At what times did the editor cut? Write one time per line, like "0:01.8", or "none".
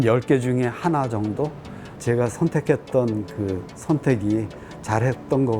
0:01.9